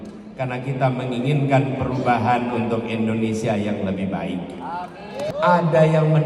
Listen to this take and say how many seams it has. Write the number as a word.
one